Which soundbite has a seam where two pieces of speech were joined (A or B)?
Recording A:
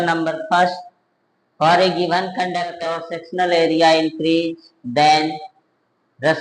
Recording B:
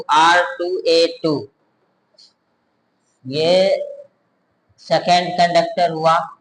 A